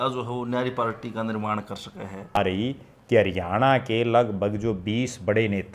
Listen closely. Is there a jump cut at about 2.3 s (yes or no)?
yes